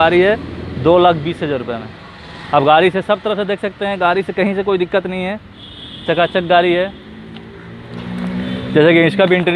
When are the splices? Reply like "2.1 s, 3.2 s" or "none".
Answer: none

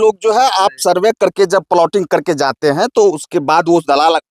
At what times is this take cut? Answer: none

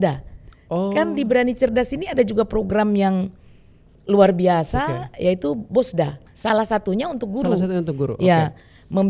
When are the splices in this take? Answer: 6.2 s

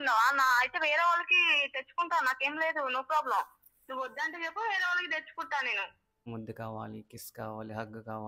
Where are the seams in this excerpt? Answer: 6.3 s

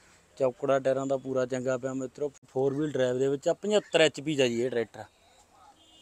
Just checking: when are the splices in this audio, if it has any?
2.4 s

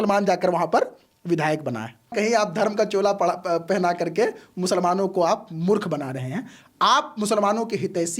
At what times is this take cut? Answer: 2.1 s

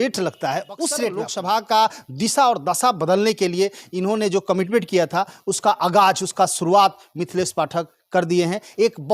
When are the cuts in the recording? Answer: 1.3 s

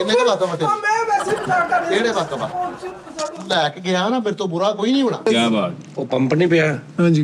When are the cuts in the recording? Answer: 5.3 s

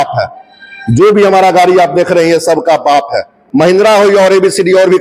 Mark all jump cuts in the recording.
3.4 s

